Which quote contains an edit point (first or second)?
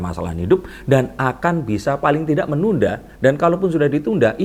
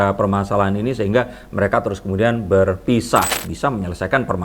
second